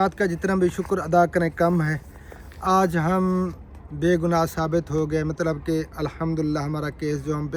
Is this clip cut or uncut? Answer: uncut